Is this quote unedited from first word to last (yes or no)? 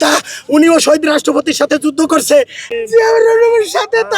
no